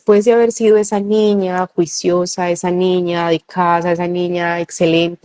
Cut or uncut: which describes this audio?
uncut